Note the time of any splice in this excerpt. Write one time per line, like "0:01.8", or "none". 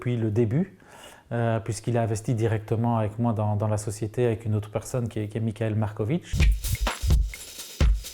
0:06.3